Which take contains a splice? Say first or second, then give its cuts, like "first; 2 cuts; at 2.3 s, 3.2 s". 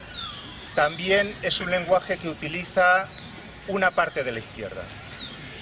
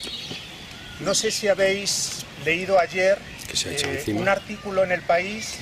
first; 1 cut; at 2.9 s